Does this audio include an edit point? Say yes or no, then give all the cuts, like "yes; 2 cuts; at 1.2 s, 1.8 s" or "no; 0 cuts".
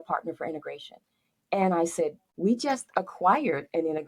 yes; 1 cut; at 2.2 s